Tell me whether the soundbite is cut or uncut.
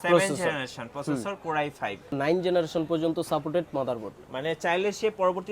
cut